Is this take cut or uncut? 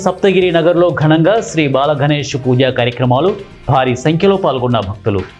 uncut